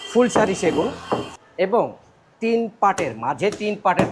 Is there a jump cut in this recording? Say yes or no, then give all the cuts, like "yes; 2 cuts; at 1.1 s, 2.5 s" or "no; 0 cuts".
yes; 1 cut; at 1.3 s